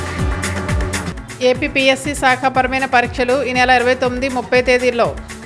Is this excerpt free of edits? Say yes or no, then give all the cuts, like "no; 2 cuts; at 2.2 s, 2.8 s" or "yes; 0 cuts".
no; 1 cut; at 1.0 s